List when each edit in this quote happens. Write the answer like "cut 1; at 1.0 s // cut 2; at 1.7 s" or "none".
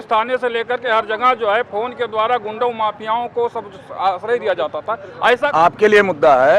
cut 1; at 5.5 s